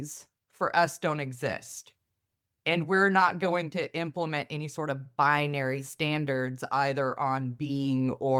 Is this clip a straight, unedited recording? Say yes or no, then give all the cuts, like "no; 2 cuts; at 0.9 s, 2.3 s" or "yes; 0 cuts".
yes; 0 cuts